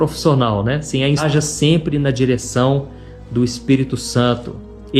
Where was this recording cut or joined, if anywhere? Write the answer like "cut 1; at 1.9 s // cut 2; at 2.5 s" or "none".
cut 1; at 1.2 s